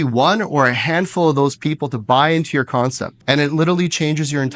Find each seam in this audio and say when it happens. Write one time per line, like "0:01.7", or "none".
0:03.1